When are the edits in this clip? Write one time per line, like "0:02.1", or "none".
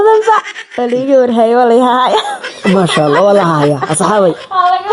none